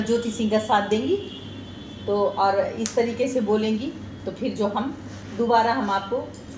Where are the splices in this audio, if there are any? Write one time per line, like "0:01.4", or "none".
none